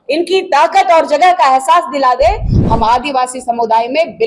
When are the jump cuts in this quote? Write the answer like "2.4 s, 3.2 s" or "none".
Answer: 2.6 s